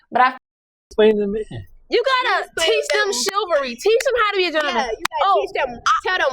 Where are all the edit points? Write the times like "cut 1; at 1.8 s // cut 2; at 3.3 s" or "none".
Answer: cut 1; at 0.9 s